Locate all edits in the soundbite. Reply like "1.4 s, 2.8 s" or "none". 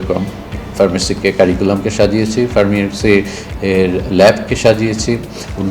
none